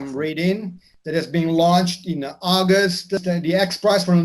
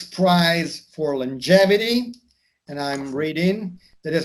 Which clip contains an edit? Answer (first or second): first